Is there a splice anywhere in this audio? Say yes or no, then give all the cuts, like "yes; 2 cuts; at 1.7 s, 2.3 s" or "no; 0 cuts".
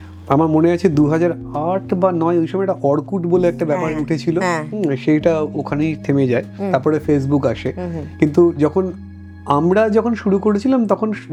no; 0 cuts